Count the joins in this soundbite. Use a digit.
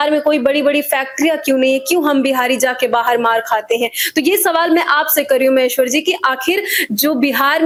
0